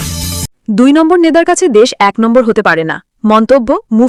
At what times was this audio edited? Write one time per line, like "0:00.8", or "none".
none